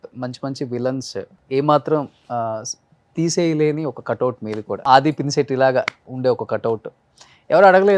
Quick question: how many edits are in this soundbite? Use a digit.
3